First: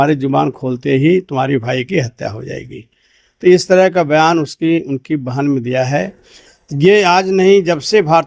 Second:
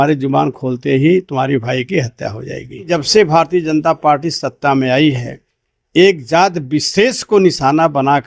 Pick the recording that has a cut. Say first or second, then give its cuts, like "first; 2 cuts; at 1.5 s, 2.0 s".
second; 1 cut; at 2.9 s